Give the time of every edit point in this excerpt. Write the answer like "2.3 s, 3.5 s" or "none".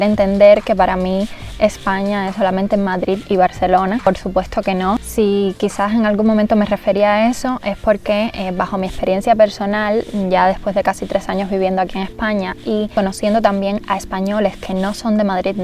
none